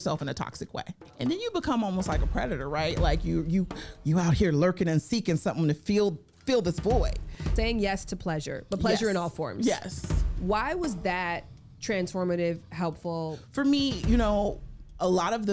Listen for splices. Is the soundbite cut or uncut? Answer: cut